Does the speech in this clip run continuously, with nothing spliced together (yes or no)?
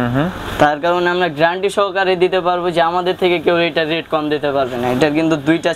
yes